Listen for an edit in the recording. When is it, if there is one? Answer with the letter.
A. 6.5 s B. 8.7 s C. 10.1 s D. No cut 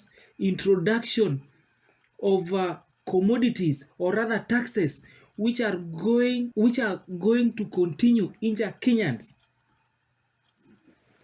A